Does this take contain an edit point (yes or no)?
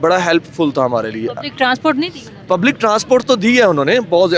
no